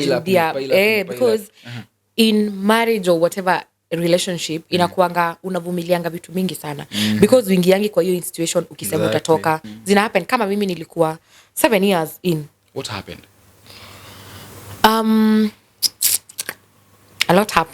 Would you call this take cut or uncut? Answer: cut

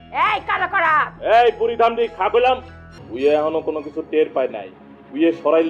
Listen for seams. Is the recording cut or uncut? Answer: cut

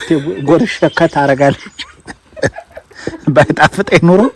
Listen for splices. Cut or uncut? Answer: uncut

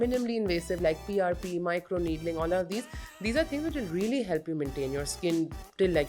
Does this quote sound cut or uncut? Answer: uncut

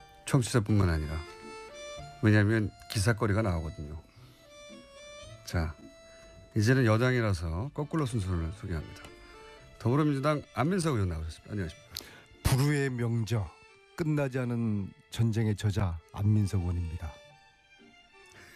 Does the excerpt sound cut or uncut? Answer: uncut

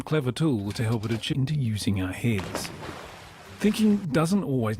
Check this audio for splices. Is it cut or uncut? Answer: uncut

